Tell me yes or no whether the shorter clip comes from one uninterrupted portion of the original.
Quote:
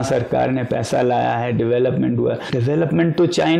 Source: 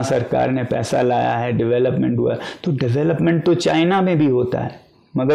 no